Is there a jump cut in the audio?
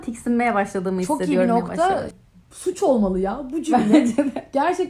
yes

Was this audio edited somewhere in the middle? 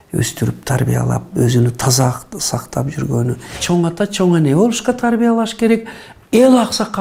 yes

